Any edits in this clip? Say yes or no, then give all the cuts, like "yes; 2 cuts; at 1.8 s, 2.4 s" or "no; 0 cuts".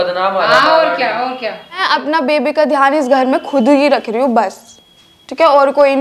yes; 1 cut; at 1.8 s